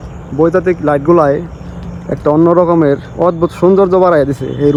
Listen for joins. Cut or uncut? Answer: uncut